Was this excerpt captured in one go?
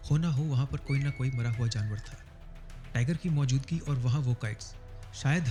yes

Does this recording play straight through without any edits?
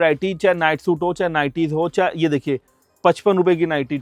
yes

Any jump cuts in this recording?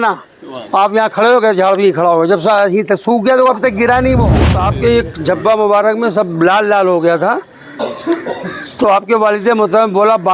yes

